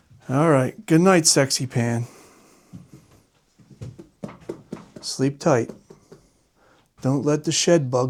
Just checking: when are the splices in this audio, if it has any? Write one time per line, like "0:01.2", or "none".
none